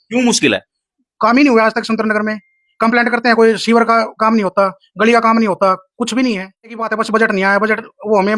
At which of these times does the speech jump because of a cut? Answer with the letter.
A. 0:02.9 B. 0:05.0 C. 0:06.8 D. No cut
C